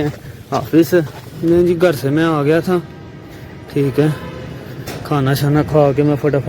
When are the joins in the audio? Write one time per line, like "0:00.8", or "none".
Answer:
0:01.2